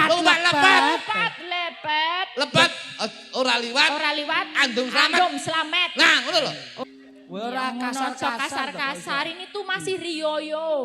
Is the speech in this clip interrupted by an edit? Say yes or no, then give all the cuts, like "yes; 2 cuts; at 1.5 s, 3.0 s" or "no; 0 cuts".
yes; 1 cut; at 6.7 s